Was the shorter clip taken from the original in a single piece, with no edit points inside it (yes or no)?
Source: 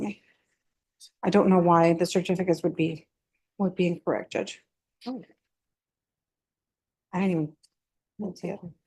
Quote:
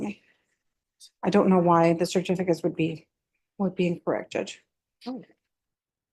yes